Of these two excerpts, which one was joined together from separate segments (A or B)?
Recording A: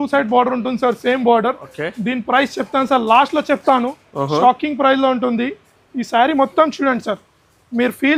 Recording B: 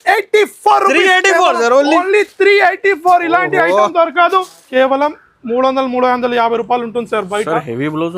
B